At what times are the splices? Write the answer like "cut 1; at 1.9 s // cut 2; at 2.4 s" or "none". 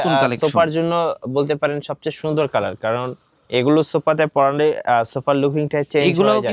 none

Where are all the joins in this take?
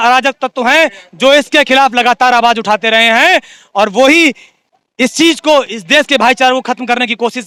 none

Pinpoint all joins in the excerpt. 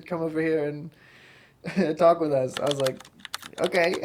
none

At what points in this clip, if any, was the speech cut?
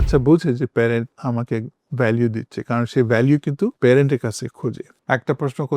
cut 1; at 1.1 s // cut 2; at 4.9 s

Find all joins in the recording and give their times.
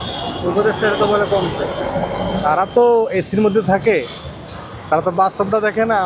none

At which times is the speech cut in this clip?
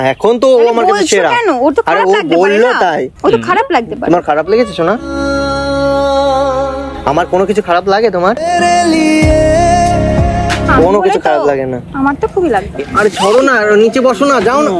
cut 1; at 12.8 s

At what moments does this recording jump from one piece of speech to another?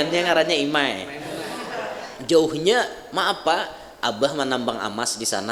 cut 1; at 2.0 s

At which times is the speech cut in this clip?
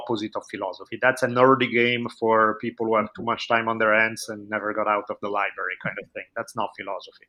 none

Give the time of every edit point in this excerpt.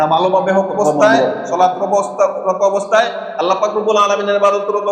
cut 1; at 1.0 s

